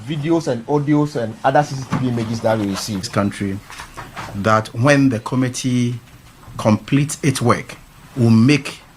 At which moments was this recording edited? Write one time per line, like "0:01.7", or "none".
0:03.1

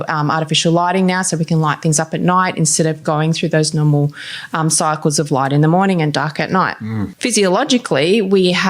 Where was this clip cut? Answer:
0:07.1

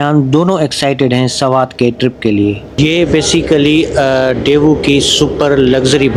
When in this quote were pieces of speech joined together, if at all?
none

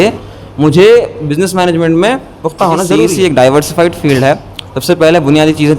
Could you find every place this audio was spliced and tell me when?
0:03.1

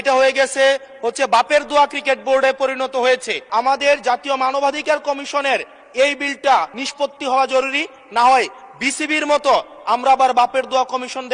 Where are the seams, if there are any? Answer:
0:03.4
0:06.8

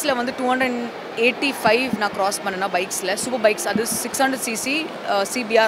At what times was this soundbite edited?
none

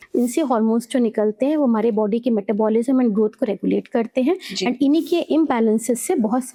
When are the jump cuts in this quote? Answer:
none

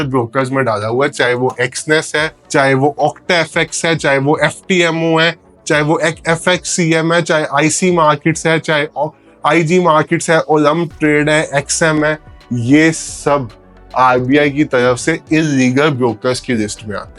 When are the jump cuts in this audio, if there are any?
none

